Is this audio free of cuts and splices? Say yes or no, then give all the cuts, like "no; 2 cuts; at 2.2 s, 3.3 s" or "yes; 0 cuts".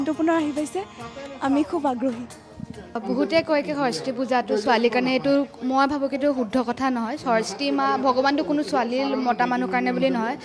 no; 1 cut; at 3.0 s